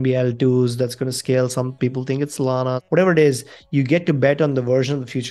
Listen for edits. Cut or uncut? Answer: cut